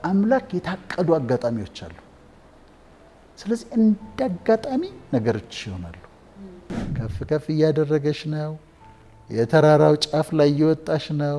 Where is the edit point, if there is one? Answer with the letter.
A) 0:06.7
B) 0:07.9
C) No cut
A